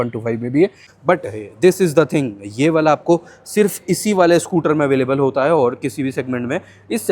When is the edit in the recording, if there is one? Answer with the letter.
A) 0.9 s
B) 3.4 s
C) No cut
A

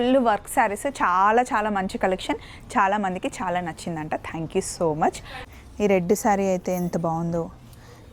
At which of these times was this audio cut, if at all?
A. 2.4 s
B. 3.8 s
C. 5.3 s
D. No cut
C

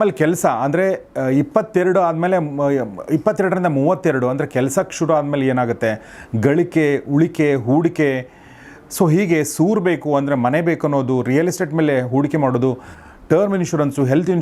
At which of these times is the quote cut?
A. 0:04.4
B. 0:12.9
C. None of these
B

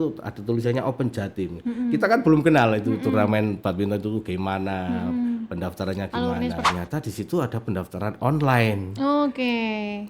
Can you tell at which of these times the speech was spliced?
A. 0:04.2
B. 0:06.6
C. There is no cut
B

